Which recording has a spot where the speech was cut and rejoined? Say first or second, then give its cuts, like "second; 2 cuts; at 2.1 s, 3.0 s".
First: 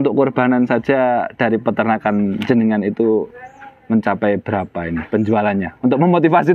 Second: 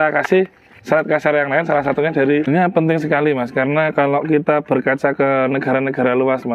second; 1 cut; at 2.5 s